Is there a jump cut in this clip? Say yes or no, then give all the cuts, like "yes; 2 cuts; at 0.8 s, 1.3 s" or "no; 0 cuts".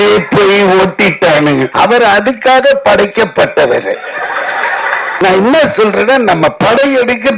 yes; 2 cuts; at 1.7 s, 5.1 s